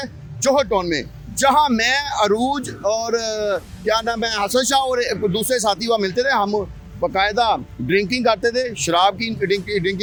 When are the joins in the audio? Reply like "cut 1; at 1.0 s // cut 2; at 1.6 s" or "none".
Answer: none

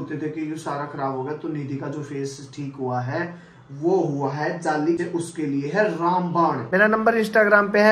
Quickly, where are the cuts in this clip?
cut 1; at 5.0 s // cut 2; at 6.6 s

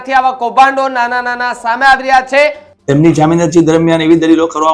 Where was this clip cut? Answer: cut 1; at 2.7 s

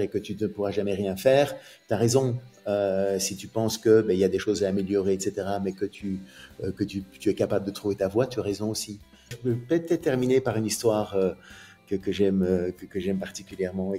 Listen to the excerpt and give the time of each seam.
cut 1; at 9.4 s

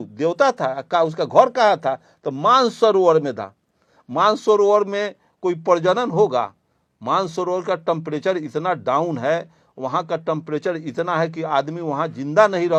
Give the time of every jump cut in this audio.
none

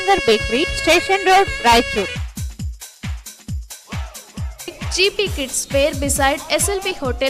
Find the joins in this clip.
cut 1; at 2.2 s

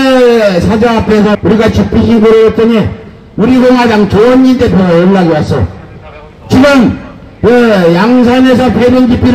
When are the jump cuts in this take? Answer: cut 1; at 1.4 s

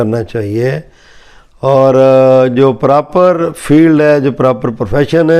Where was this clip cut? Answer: none

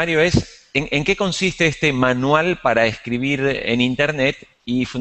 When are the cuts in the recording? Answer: none

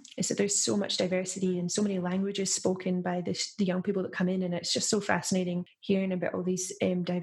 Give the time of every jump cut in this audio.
cut 1; at 5.7 s

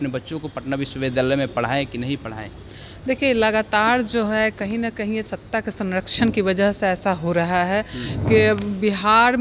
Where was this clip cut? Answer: none

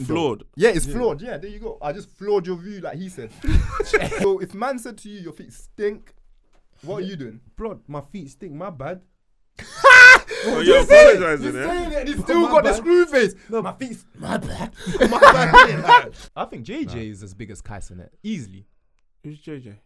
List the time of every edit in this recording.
cut 1; at 4.2 s // cut 2; at 16.2 s

